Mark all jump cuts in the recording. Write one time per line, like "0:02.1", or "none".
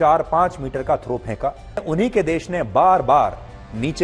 0:01.8

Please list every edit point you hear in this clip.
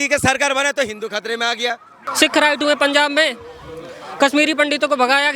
0:02.0

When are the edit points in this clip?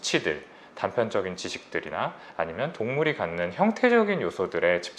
none

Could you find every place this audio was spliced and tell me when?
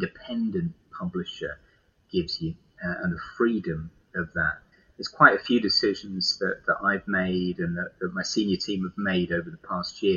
0:04.7

